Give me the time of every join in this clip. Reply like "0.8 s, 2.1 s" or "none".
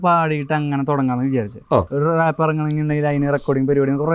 1.9 s